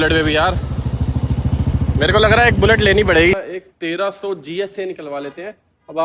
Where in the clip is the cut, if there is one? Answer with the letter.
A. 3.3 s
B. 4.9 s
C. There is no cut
A